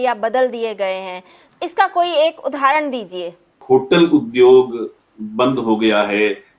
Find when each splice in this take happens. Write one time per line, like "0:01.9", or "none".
0:03.6